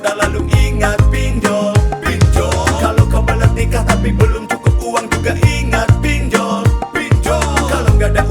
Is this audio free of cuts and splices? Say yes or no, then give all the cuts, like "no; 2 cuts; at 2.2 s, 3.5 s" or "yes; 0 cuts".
yes; 0 cuts